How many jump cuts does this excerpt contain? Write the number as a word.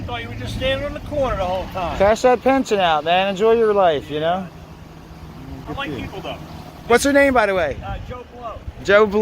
two